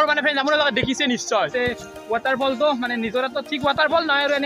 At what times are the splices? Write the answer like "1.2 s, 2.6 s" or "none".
1.5 s